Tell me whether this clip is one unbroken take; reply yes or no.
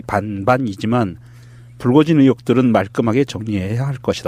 yes